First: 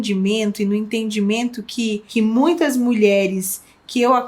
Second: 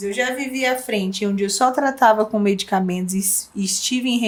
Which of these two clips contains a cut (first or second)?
first